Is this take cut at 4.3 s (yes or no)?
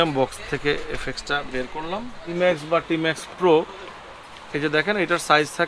no